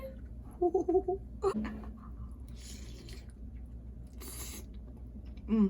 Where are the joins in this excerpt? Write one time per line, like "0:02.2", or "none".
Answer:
0:01.6